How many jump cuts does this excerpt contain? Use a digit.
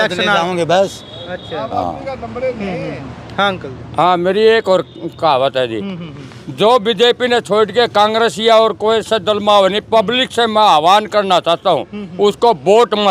0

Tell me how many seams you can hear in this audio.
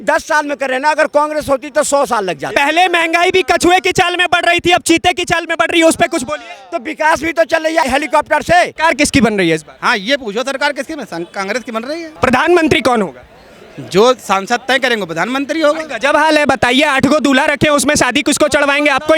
4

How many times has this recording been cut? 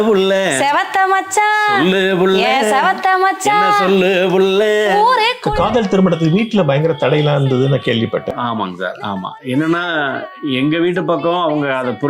1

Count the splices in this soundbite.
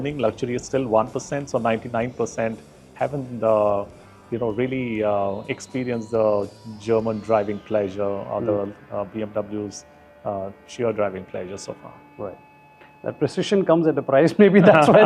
0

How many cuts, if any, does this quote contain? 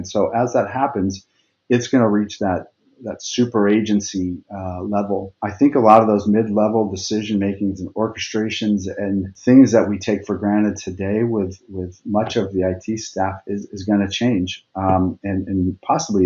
2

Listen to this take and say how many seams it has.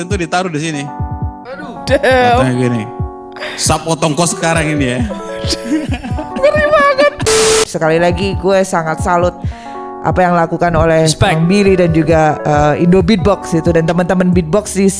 1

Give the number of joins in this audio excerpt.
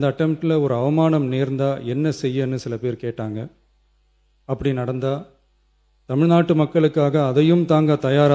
0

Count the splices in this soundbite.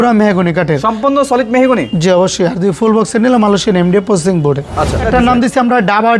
1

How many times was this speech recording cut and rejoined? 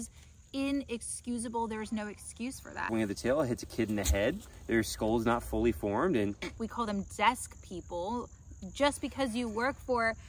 2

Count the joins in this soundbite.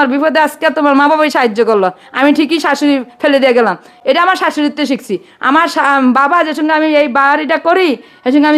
0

